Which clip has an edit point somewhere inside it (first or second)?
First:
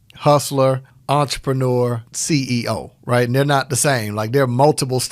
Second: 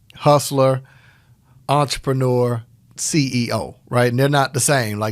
first